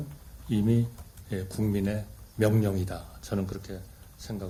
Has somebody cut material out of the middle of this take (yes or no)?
no